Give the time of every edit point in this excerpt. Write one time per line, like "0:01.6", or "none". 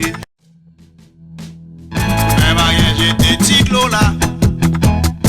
0:04.1